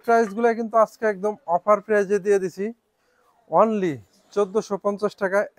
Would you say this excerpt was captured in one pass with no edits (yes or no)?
yes